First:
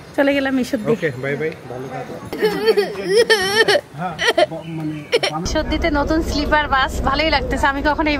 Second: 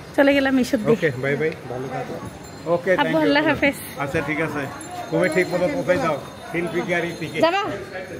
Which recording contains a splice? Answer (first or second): first